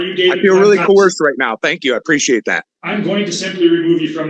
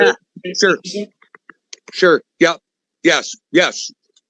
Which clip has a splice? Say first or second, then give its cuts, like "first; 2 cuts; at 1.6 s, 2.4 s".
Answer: first; 1 cut; at 2.7 s